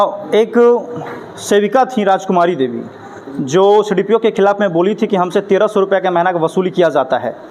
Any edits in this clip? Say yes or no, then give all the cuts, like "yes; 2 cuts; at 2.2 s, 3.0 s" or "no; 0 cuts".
no; 0 cuts